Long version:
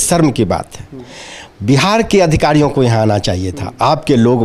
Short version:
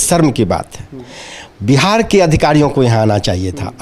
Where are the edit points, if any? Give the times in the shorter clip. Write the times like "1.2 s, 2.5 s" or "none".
none